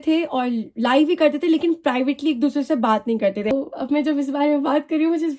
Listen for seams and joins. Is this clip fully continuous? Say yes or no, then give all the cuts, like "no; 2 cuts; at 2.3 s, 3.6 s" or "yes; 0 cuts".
no; 1 cut; at 3.5 s